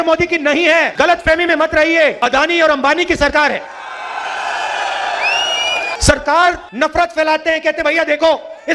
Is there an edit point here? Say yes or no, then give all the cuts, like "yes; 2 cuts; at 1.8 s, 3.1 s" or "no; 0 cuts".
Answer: yes; 4 cuts; at 0.9 s, 2.2 s, 5.9 s, 6.7 s